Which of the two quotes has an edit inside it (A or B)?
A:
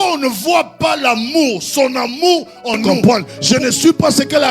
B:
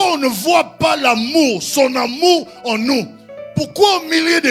A